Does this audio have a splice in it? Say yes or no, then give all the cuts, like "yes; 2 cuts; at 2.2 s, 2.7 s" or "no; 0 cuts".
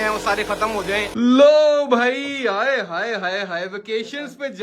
yes; 1 cut; at 1.1 s